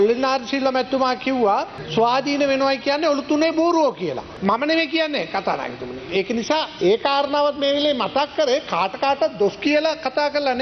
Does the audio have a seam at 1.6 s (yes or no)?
no